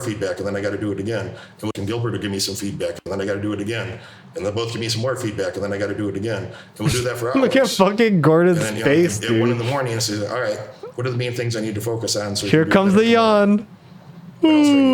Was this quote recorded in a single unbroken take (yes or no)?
yes